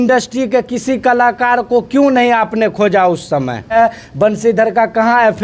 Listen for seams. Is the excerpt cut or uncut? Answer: cut